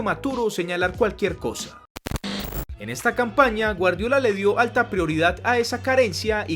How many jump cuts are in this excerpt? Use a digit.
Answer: 1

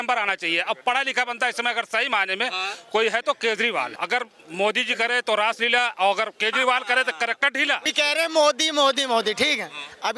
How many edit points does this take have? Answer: 2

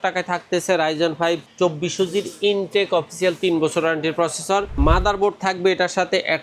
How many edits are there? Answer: 2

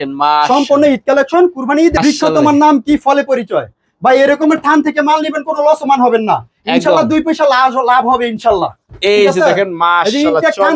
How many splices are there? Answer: 1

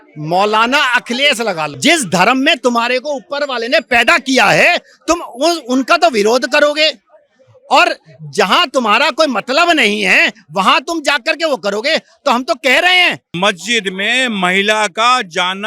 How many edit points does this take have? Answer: 2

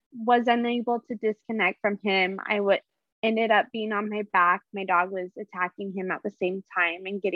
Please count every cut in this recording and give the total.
0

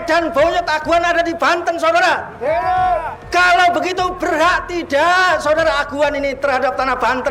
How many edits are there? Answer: 0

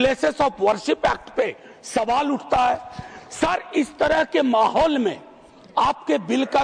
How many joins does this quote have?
0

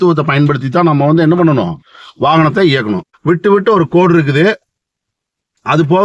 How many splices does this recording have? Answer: 1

